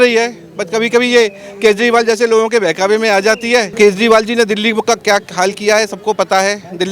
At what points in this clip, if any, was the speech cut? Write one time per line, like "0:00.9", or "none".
0:03.7